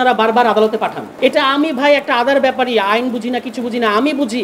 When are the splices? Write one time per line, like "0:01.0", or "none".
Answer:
0:01.0